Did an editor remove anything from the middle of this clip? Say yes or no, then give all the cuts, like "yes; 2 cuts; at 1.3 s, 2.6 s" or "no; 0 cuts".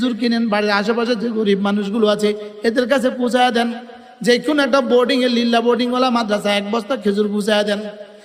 no; 0 cuts